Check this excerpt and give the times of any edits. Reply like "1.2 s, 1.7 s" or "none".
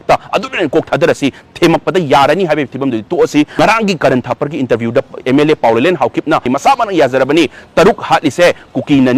3.6 s, 6.5 s